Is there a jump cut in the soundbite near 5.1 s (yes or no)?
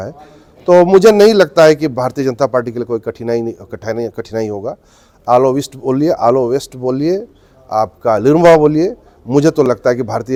no